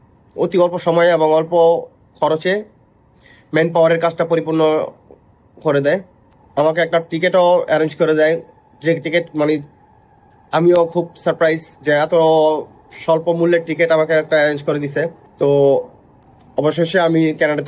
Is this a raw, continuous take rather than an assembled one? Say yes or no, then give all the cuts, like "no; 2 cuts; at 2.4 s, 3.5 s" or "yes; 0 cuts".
yes; 0 cuts